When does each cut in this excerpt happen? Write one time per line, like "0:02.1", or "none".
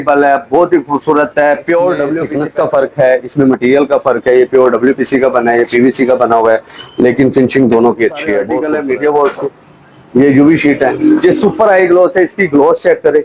0:02.3
0:08.5